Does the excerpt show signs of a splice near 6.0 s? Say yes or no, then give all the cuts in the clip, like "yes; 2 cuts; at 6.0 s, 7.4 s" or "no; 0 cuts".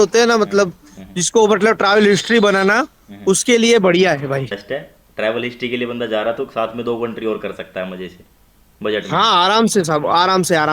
no; 1 cut; at 4.6 s